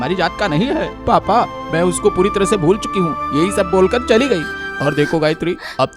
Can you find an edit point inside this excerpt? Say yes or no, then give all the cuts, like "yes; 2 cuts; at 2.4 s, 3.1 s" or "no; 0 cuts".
no; 0 cuts